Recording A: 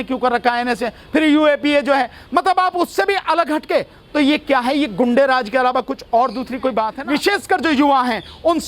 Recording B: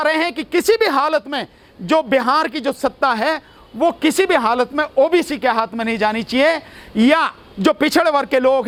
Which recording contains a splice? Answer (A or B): A